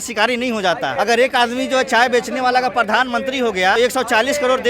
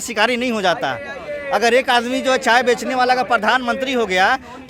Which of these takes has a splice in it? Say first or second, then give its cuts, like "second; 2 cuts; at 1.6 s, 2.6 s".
first; 2 cuts; at 0.9 s, 3.8 s